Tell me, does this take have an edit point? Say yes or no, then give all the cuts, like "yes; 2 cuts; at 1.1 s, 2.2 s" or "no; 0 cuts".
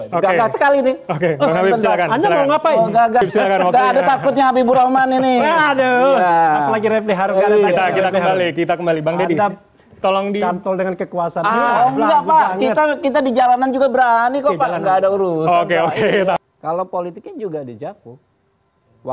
yes; 2 cuts; at 3.2 s, 16.4 s